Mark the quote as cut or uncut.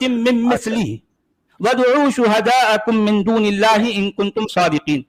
uncut